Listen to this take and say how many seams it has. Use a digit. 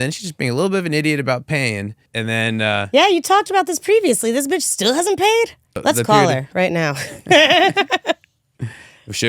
2